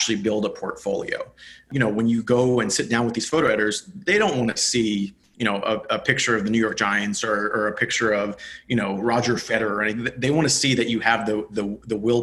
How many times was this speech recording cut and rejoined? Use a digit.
1